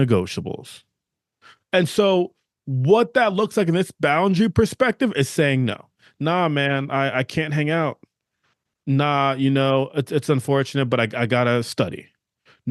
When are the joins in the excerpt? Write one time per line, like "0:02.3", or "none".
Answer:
none